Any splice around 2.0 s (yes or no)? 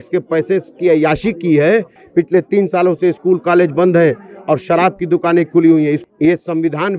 yes